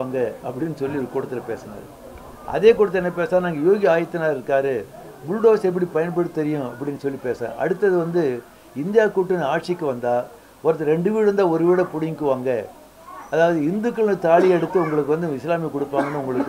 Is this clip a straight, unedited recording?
yes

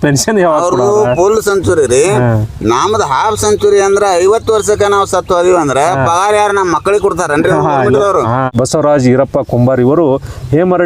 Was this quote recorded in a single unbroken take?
no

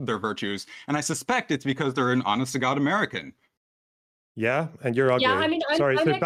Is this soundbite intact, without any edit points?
yes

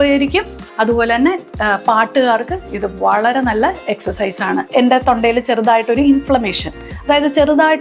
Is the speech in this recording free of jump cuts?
no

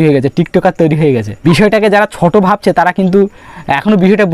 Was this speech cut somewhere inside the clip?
yes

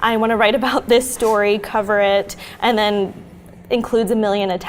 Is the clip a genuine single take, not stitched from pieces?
yes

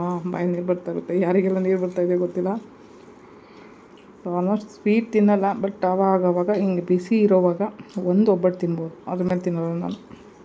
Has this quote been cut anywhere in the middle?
no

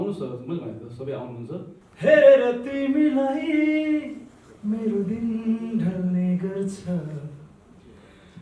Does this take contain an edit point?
yes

